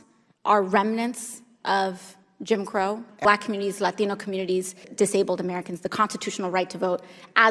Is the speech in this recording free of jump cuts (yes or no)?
no